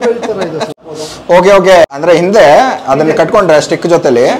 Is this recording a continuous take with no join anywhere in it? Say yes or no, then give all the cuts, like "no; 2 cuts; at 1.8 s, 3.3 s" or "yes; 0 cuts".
no; 2 cuts; at 0.9 s, 1.9 s